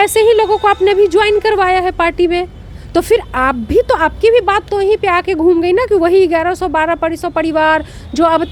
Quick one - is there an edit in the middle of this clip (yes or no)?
no